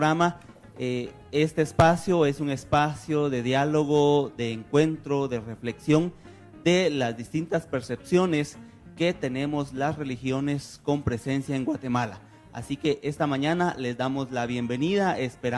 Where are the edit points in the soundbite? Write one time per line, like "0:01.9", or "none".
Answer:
0:11.5

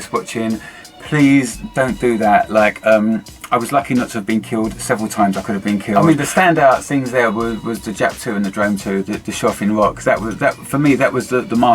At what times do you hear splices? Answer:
0:05.9

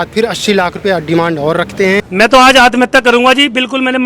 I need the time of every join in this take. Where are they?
0:02.0

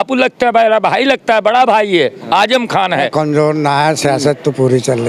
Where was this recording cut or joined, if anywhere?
0:03.1

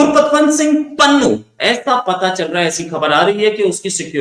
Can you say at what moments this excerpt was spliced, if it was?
0:01.5

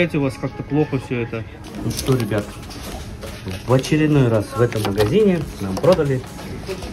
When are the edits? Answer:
0:01.6

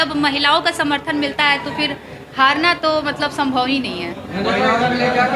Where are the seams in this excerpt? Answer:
none

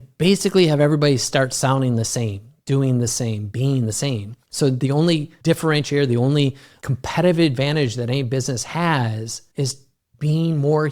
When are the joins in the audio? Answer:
0:04.4
0:05.3
0:06.7
0:09.9

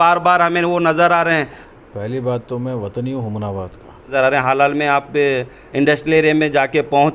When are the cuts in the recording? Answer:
0:01.6
0:04.1

